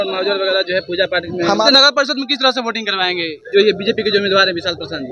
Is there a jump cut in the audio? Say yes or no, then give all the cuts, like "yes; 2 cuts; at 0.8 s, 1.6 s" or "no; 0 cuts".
yes; 2 cuts; at 1.6 s, 3.3 s